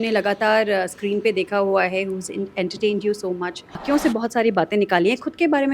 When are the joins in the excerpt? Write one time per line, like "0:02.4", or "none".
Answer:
0:03.8